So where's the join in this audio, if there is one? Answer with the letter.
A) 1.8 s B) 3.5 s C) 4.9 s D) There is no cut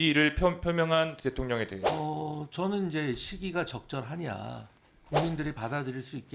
A